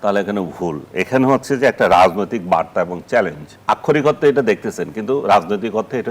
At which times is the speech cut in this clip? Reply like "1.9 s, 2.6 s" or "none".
3.5 s